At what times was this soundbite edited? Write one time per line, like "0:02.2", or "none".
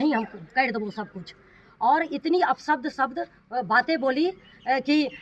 none